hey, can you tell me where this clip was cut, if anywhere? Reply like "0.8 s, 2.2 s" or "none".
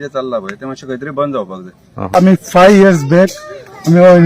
2.5 s

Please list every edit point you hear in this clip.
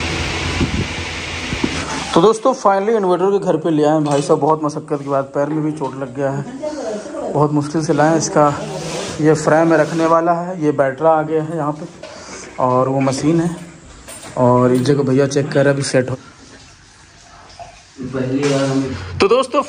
1.8 s, 16.1 s, 18.9 s

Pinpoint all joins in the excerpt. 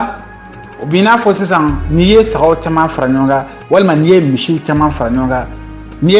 none

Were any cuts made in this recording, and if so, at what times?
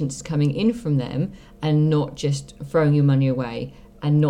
2.5 s

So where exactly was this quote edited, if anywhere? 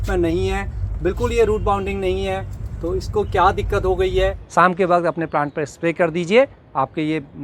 4.4 s

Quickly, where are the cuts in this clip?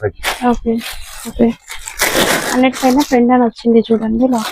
1.3 s

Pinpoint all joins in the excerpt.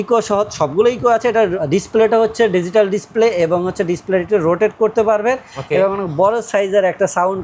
none

